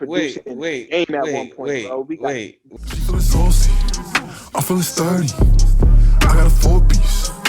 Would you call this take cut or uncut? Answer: cut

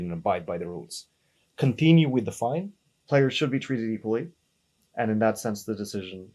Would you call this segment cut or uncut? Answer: cut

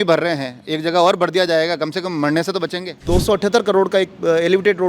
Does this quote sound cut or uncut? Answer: cut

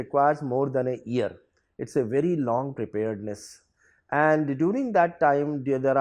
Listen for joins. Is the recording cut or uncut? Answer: uncut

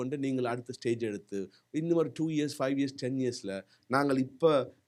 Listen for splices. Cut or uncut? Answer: uncut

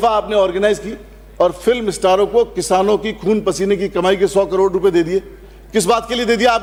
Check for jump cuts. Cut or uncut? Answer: uncut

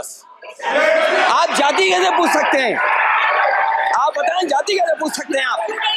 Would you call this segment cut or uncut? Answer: uncut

